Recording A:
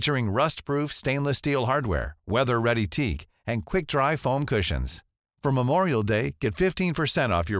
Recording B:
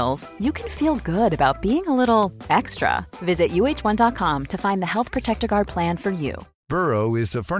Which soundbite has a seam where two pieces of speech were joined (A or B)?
B